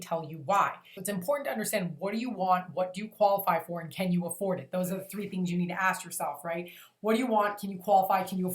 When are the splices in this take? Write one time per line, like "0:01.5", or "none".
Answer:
0:00.9